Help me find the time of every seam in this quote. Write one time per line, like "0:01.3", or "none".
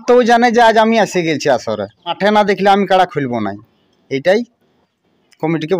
0:02.2